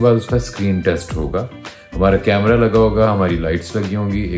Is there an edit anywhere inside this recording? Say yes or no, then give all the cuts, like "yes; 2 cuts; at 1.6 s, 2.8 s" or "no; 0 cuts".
no; 0 cuts